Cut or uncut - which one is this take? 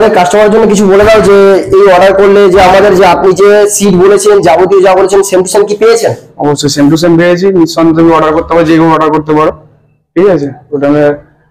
uncut